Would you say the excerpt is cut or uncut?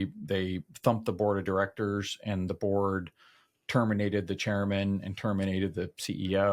uncut